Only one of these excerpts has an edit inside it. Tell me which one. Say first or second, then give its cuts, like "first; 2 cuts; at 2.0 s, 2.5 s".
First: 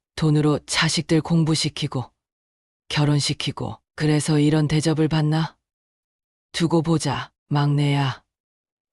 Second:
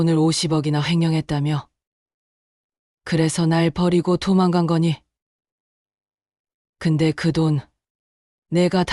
first; 1 cut; at 7.3 s